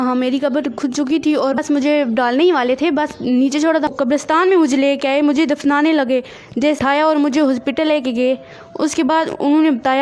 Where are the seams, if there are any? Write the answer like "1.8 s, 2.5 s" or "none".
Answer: 1.6 s, 3.9 s, 6.8 s

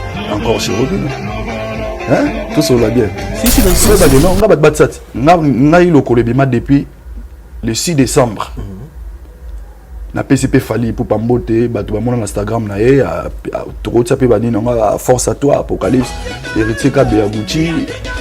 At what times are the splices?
3.8 s

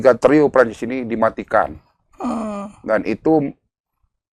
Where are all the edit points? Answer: none

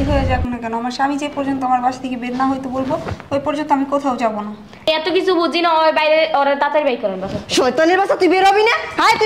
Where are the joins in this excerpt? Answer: 4.8 s

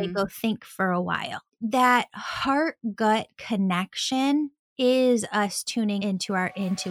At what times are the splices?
6.0 s

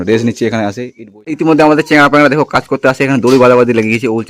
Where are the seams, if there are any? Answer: 1.0 s

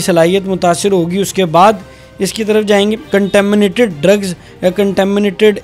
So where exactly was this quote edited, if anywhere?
3.0 s

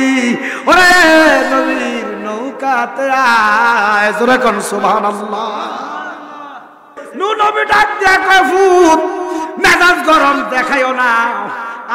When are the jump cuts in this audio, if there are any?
7.0 s

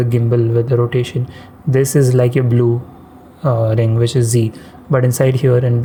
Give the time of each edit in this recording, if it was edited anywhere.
none

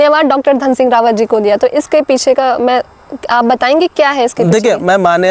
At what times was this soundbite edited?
none

